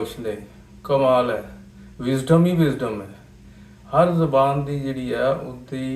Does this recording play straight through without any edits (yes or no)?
yes